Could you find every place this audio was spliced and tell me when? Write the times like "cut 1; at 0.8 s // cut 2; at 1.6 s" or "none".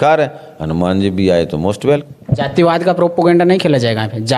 cut 1; at 2.2 s